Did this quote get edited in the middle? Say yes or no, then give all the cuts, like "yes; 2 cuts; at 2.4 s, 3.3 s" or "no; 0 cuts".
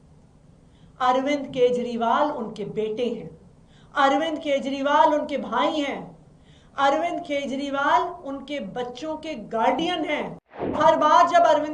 yes; 1 cut; at 10.8 s